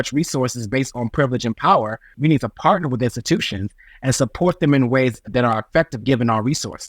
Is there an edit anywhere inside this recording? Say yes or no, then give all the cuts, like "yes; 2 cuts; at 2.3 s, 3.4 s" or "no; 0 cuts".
yes; 2 cuts; at 2.1 s, 5.2 s